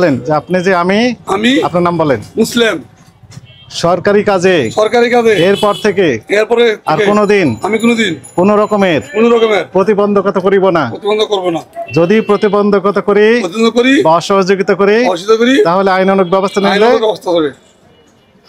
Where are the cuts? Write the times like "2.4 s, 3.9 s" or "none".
none